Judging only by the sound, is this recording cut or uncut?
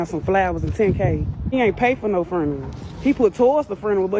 uncut